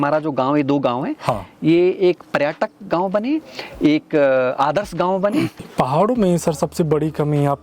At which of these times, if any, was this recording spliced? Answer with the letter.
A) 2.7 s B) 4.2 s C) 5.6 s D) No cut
C